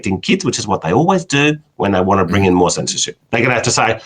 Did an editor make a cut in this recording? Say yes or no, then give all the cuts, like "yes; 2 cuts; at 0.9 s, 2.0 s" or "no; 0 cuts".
yes; 1 cut; at 3.1 s